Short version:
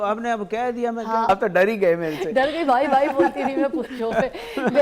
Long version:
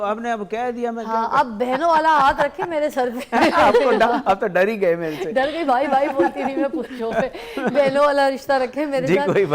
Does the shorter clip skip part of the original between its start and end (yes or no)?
yes